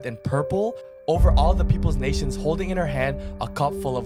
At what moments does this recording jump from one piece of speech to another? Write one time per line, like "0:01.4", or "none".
none